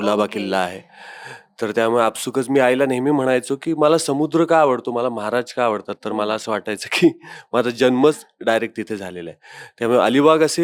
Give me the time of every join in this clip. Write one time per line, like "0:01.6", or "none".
none

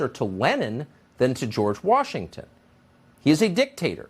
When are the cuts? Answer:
0:02.9

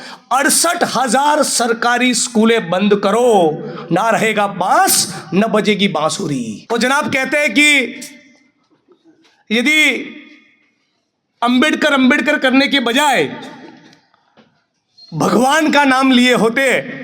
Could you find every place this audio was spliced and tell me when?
0:06.6

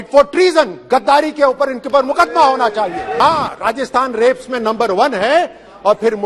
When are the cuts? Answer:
0:03.1

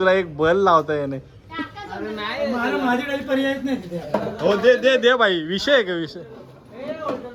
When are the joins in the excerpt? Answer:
none

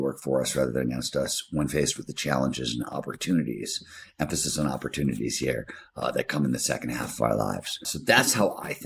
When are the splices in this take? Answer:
0:07.9

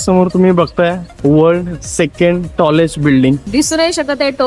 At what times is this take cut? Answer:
0:01.1
0:03.5

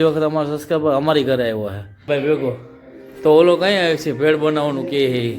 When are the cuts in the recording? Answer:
0:02.0

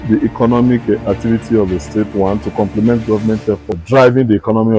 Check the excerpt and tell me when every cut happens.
0:03.7

